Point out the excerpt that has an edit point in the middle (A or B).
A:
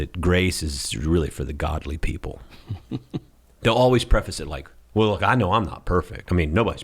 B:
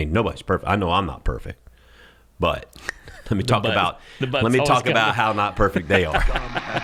A